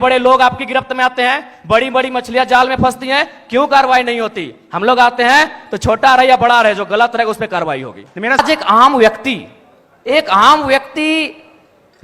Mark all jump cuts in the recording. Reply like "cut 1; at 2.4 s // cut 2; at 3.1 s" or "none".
cut 1; at 8.4 s